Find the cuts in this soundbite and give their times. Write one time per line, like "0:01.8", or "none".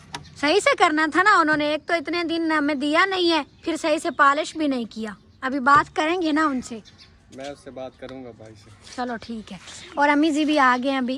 none